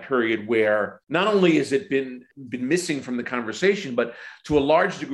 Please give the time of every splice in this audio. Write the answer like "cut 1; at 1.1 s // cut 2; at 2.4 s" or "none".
cut 1; at 1.0 s // cut 2; at 2.2 s